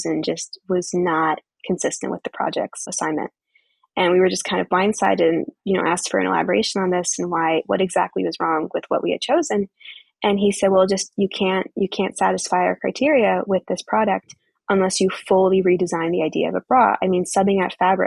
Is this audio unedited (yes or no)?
yes